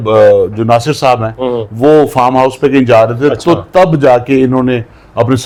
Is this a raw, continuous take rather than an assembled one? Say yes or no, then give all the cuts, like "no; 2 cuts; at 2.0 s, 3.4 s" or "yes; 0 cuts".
yes; 0 cuts